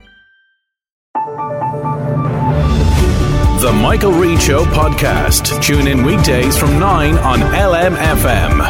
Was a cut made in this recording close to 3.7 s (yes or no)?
no